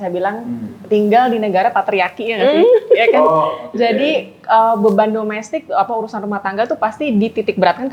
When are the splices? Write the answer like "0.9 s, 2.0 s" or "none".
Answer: none